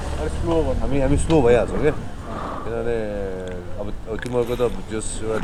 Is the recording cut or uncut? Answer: uncut